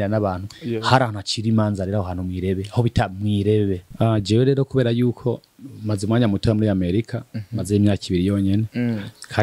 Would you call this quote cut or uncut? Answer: cut